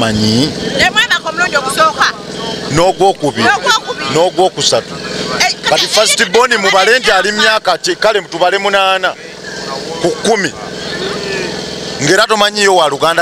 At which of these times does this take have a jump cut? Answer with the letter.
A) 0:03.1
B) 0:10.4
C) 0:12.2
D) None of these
D